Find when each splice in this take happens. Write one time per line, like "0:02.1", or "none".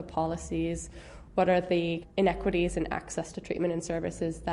0:02.0